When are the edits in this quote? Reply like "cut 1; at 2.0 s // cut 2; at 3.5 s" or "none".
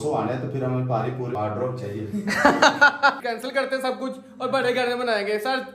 cut 1; at 1.4 s // cut 2; at 3.2 s